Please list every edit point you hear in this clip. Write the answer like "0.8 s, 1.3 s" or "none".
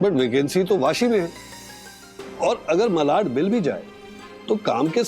none